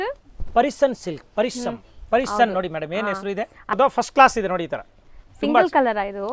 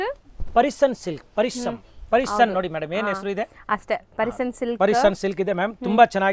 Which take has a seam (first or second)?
first